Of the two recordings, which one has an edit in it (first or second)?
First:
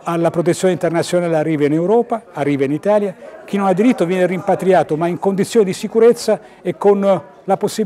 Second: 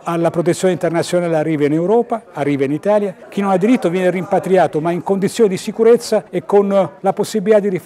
second